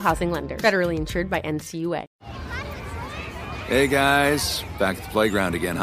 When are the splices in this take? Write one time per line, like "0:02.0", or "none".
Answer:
0:02.1